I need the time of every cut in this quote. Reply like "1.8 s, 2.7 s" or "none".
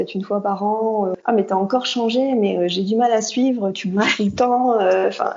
1.1 s